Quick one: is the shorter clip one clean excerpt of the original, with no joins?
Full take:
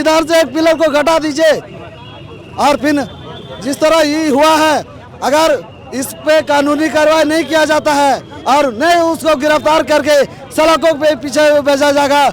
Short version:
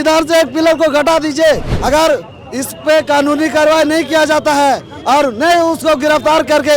no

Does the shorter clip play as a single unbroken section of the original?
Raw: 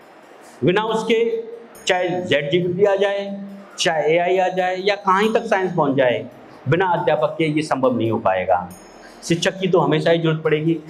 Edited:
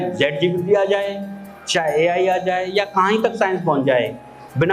yes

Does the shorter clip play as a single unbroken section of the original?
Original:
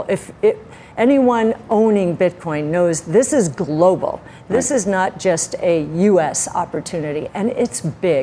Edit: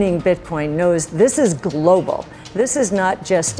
yes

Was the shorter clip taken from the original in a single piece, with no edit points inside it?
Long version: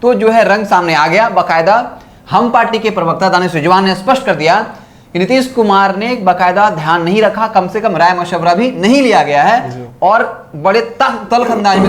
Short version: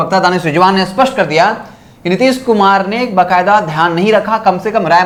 yes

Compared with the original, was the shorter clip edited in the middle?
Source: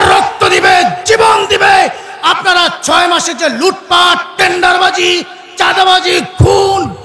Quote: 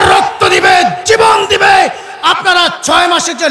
no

